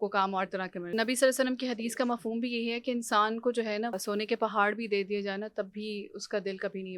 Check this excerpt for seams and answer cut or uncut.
cut